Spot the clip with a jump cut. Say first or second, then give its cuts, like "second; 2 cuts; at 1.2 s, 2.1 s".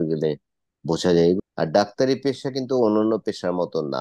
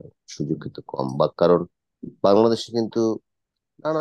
first; 1 cut; at 1.4 s